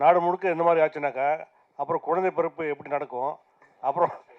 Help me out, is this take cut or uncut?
uncut